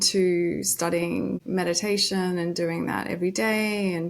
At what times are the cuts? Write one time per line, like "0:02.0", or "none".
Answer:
0:01.4